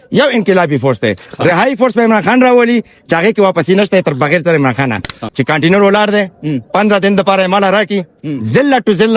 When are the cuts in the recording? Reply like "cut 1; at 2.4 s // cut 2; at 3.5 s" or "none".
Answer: cut 1; at 5.2 s